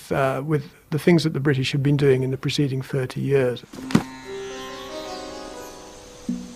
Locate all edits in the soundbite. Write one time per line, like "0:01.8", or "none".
none